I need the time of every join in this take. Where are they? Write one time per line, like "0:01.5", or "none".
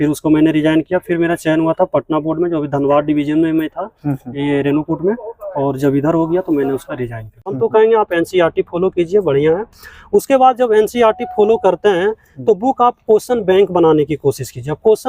0:07.5